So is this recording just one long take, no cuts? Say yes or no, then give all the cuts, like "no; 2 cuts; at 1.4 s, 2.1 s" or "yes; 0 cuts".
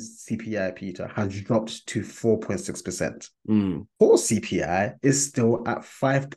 no; 1 cut; at 3.8 s